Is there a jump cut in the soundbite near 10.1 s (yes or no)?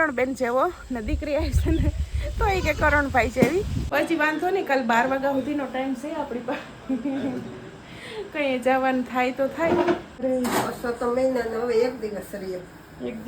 yes